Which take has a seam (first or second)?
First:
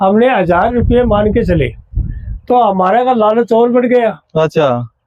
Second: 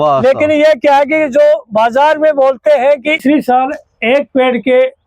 second